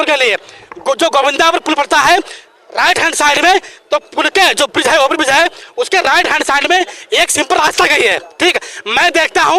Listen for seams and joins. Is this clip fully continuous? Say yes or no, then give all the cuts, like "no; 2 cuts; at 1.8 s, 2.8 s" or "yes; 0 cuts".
yes; 0 cuts